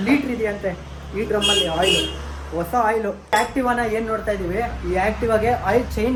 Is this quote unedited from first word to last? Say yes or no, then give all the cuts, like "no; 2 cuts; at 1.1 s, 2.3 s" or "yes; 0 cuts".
yes; 0 cuts